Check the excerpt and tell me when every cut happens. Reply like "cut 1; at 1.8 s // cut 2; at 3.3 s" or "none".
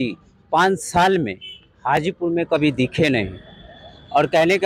none